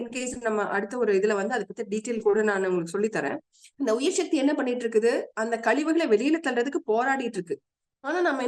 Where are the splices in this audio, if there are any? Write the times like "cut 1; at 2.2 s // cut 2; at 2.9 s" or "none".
cut 1; at 3.6 s